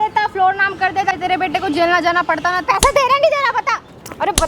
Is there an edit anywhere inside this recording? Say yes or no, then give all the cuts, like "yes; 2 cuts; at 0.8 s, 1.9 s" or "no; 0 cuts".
yes; 2 cuts; at 1.1 s, 2.7 s